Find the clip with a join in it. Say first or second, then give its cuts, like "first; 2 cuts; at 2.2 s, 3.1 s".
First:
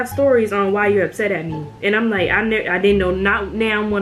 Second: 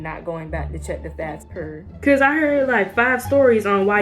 second; 1 cut; at 1.5 s